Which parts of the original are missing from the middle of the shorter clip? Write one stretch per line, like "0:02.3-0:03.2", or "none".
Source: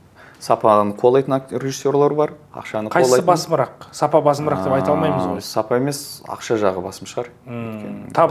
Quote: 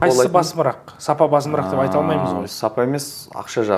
none